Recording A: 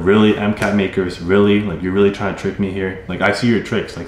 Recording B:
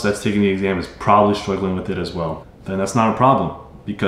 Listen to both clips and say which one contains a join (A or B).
A